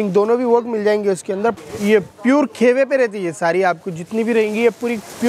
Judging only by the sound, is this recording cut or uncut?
cut